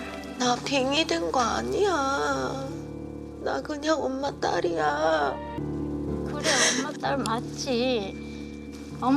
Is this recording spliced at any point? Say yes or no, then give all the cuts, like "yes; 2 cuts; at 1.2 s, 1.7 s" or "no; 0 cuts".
yes; 1 cut; at 5.6 s